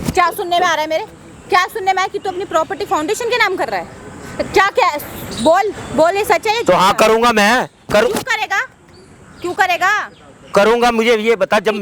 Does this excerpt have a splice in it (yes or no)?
no